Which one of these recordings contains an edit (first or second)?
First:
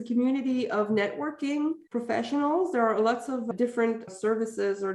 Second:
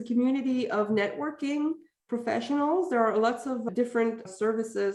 first